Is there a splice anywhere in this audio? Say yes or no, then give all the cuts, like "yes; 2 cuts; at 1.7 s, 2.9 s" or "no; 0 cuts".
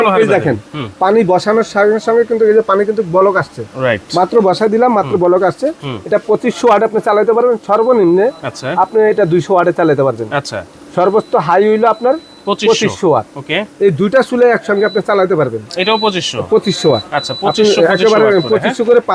no; 0 cuts